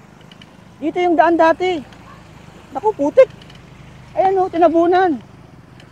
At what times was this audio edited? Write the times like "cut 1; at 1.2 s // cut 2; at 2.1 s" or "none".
none